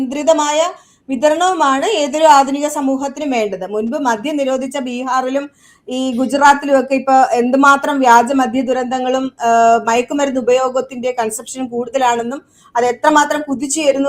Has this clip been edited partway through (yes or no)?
no